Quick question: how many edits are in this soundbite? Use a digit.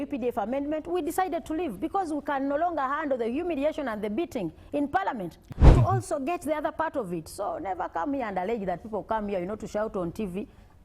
1